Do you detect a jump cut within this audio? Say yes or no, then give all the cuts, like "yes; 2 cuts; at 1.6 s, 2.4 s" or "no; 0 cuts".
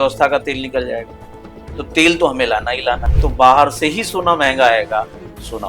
yes; 1 cut; at 3.1 s